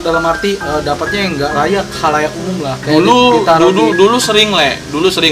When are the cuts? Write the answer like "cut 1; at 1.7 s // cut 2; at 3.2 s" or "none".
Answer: cut 1; at 2.8 s

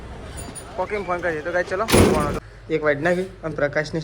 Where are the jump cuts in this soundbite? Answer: cut 1; at 2.4 s

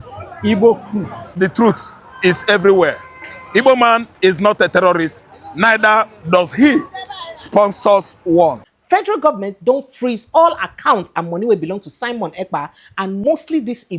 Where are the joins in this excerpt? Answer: cut 1; at 1.2 s // cut 2; at 8.6 s // cut 3; at 13.2 s

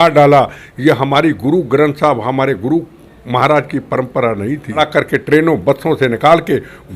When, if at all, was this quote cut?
cut 1; at 4.8 s

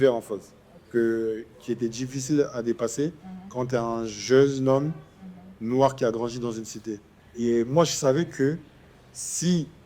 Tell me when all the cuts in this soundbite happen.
cut 1; at 7.2 s

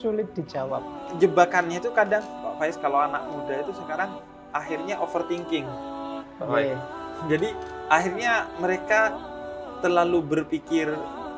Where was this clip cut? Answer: cut 1; at 1.0 s

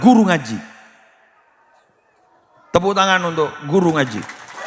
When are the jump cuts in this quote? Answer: none

